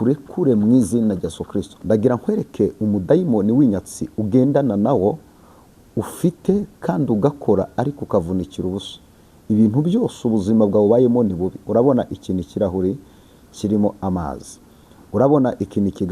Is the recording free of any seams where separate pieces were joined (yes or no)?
no